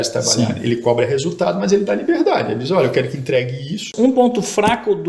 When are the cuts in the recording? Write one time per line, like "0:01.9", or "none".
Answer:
0:03.9